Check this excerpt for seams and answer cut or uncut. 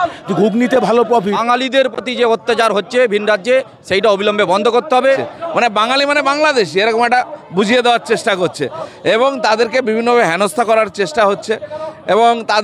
cut